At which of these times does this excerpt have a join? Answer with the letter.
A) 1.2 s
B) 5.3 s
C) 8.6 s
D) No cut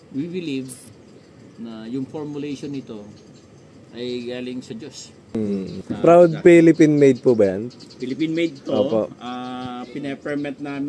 B